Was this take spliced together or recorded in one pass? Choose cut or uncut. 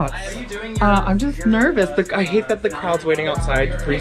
uncut